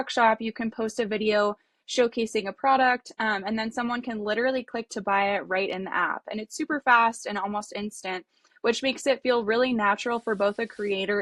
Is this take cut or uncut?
uncut